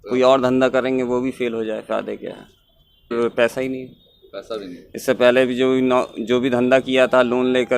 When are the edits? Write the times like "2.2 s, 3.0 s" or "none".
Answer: 3.1 s